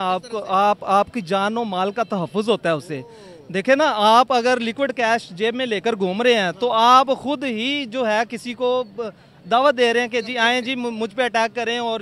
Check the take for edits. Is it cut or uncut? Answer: uncut